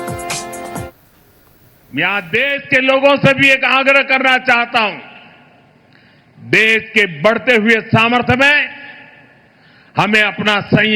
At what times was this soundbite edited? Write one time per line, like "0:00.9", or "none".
0:01.2
0:03.9